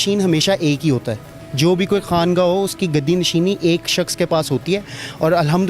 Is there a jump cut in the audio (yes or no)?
no